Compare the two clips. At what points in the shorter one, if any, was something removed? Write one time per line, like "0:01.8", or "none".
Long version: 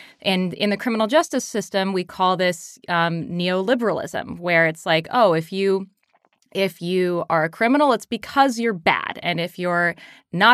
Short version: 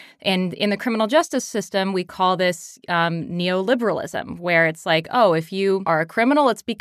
0:05.8

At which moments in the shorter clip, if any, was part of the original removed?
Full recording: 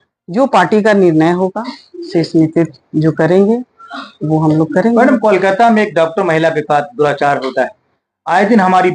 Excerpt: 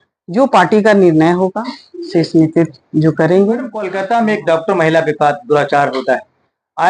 0:03.9

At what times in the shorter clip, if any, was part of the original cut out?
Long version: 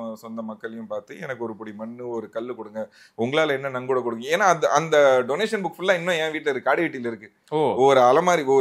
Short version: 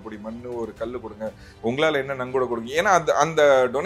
none

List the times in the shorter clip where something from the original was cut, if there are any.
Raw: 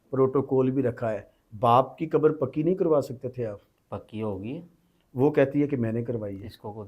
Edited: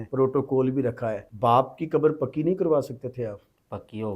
0:01.2

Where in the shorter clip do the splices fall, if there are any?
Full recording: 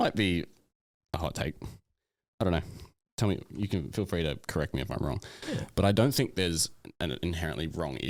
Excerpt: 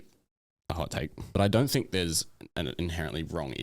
0:01.4

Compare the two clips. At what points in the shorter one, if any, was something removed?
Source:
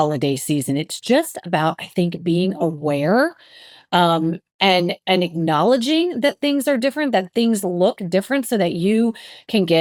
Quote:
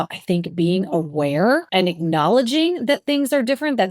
0:01.7

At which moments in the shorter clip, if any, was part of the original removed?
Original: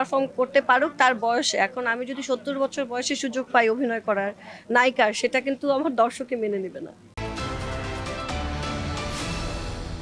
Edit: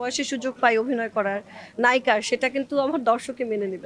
none

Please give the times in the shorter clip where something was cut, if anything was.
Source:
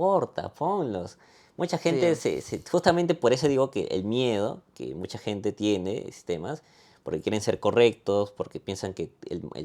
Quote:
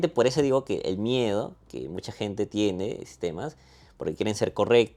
none

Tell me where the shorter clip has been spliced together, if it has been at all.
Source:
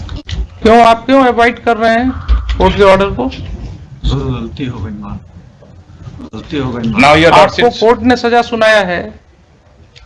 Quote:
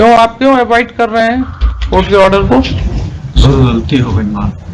none

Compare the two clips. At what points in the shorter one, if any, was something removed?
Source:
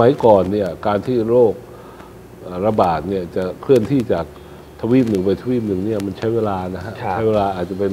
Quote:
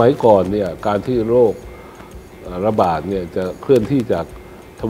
none

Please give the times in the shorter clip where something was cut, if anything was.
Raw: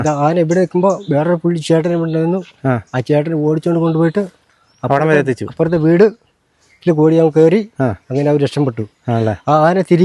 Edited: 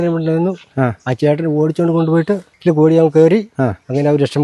0:02.5

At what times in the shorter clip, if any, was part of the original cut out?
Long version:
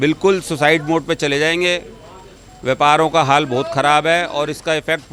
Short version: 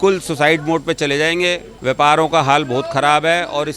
0:01.7

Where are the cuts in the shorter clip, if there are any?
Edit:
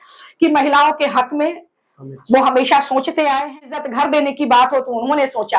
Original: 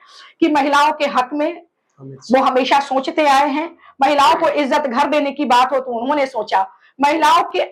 0:03.8

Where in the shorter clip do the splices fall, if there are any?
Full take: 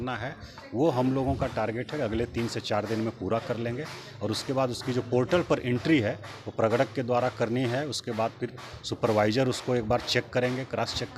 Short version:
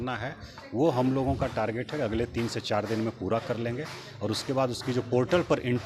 none

